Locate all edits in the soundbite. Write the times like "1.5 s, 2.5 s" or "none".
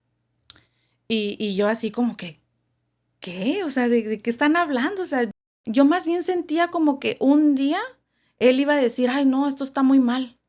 5.4 s